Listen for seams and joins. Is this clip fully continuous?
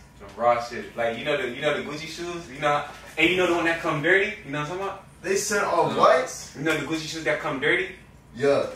yes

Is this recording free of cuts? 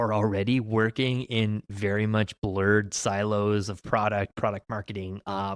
yes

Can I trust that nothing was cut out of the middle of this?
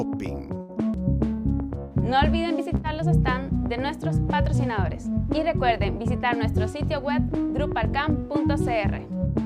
no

